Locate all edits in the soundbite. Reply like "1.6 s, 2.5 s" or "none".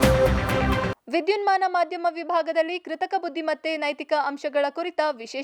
0.9 s

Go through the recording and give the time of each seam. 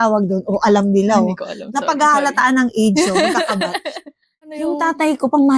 4.5 s

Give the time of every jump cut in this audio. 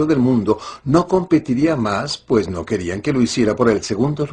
2.2 s

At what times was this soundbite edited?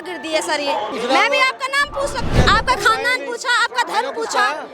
0.9 s, 2.3 s

